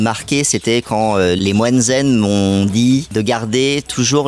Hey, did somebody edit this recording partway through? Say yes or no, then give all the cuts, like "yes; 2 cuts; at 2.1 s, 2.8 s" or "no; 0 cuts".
yes; 2 cuts; at 1.4 s, 3.1 s